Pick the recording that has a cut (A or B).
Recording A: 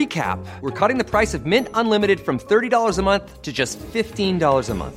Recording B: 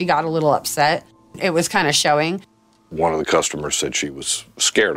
B